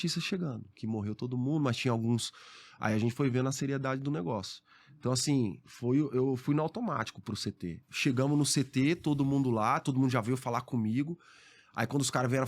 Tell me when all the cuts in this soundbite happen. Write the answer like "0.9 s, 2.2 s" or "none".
7.8 s